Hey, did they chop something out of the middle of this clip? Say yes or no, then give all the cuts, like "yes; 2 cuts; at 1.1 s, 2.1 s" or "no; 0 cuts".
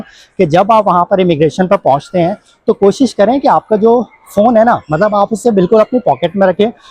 no; 0 cuts